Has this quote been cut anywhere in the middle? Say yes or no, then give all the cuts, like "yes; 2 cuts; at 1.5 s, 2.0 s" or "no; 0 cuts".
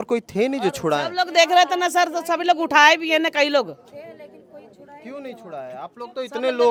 no; 0 cuts